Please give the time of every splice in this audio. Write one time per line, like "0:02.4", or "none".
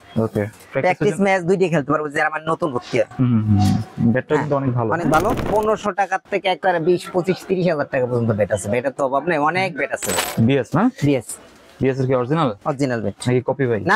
0:05.4
0:10.2